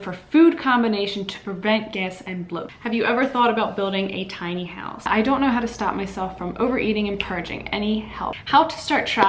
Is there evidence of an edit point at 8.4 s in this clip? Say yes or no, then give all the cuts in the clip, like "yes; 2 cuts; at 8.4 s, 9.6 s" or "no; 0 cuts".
yes; 3 cuts; at 2.7 s, 5.0 s, 8.4 s